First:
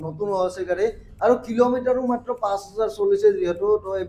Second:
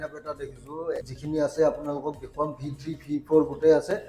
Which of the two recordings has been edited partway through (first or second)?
second